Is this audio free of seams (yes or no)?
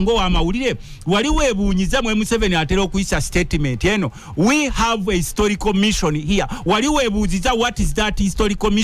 yes